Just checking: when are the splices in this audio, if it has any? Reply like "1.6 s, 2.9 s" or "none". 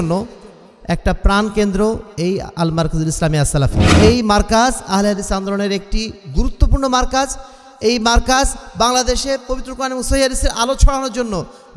3.8 s